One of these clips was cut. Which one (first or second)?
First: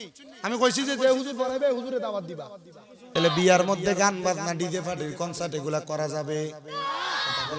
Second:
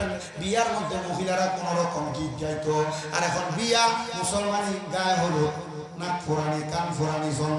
first